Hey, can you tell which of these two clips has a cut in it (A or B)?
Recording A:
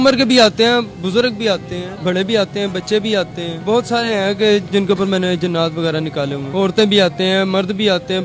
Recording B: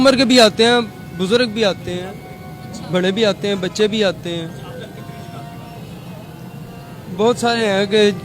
A